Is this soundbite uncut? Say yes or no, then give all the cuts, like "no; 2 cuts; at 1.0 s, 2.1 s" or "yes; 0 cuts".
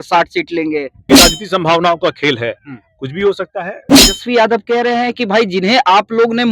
no; 2 cuts; at 1.0 s, 4.0 s